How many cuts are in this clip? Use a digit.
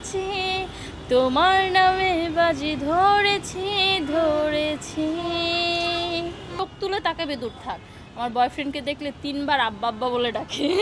1